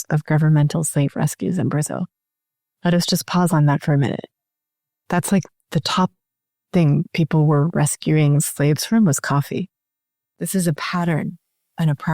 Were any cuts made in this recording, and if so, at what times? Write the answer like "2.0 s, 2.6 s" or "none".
10.3 s